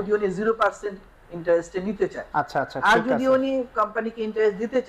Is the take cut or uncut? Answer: uncut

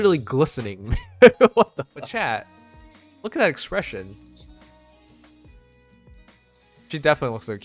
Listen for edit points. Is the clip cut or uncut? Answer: cut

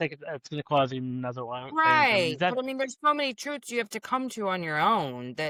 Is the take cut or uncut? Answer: uncut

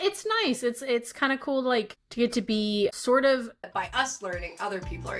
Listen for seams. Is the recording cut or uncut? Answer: cut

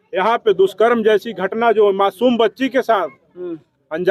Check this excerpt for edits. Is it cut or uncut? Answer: uncut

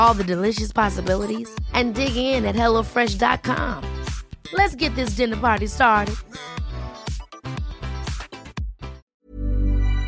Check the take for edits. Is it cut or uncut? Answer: cut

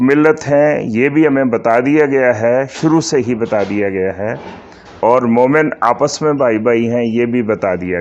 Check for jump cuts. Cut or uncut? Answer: uncut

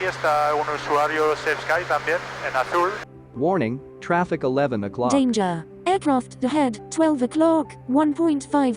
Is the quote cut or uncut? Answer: cut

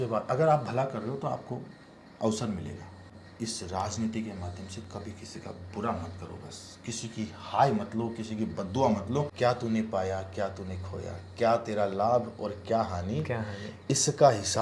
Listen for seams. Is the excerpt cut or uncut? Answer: cut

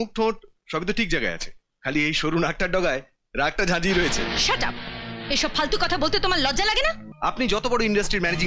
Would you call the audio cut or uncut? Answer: cut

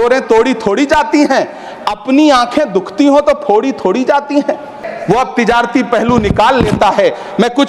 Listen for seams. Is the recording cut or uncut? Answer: cut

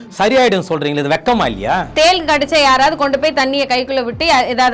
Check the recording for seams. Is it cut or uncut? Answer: cut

